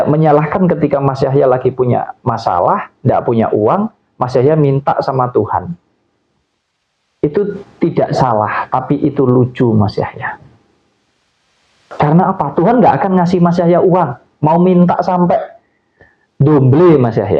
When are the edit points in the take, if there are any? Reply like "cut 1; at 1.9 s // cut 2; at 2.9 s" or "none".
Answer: none